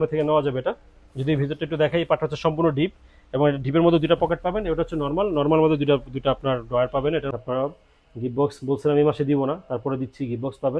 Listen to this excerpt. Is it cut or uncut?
cut